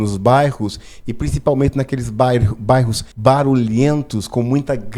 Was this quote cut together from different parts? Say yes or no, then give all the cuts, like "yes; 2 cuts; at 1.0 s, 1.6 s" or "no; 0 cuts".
yes; 1 cut; at 3.0 s